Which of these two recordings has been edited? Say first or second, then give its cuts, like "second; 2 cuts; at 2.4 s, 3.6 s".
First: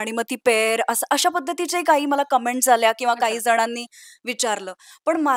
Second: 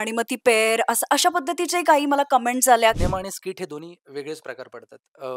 second; 1 cut; at 3.0 s